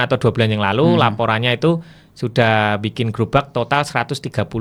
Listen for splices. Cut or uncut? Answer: uncut